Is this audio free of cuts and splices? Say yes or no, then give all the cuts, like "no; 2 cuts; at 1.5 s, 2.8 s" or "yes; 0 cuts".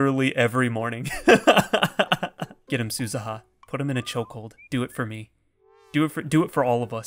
no; 1 cut; at 2.6 s